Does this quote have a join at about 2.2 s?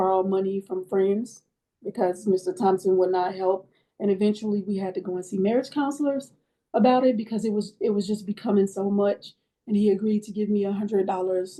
no; 0 cuts

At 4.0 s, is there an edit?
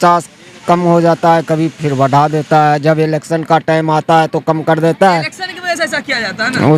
no; 0 cuts

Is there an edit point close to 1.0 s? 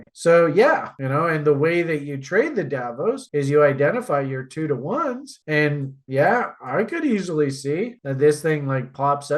yes; 1 cut; at 1.0 s

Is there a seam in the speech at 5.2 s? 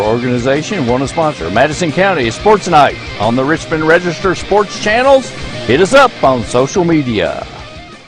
no; 0 cuts

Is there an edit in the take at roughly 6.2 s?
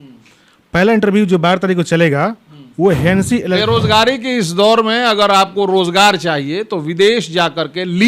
no; 1 cut; at 3.6 s

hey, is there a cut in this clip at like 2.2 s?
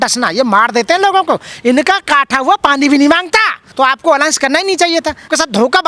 no; 1 cut; at 3.6 s

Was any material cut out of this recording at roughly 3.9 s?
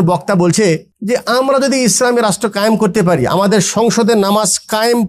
no; 1 cut; at 0.9 s

